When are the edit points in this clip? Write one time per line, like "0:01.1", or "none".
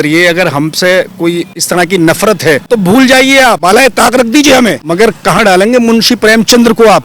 0:01.5
0:02.6
0:03.6
0:04.8